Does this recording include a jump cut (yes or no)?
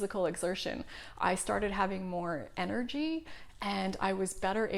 no